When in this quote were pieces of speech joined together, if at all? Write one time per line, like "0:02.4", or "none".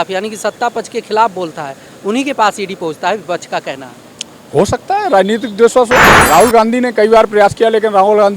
0:06.1

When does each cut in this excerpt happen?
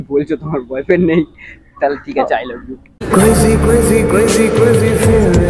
none

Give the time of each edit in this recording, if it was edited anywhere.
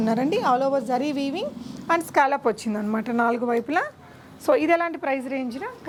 none

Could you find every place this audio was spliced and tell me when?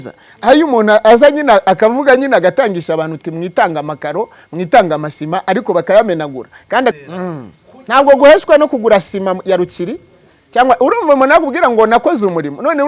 0:06.9

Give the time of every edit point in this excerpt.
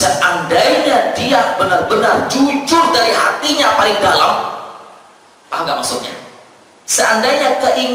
none

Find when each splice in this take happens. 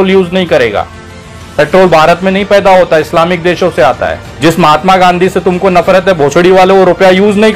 0:04.2

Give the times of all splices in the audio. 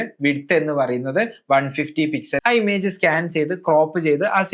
0:02.4

